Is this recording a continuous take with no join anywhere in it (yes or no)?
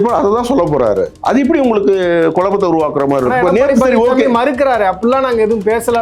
no